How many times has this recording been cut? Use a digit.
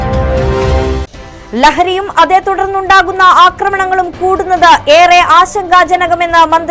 0